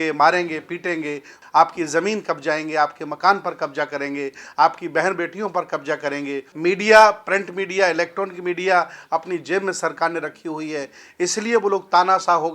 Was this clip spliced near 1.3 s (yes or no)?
yes